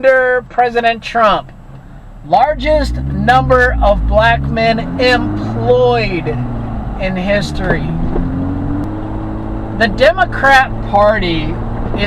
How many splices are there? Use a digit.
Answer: 1